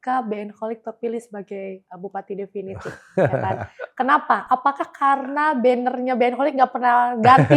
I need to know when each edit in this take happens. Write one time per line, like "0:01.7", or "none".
none